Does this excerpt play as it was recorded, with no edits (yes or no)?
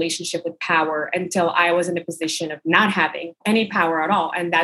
no